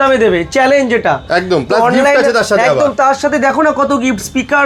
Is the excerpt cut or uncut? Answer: uncut